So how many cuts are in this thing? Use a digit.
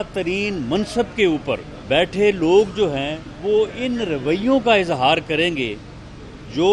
2